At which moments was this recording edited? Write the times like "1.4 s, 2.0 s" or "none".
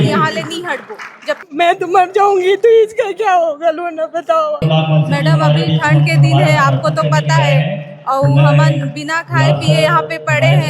1.4 s, 4.6 s